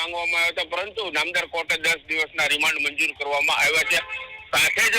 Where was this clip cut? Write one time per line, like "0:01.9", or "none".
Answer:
none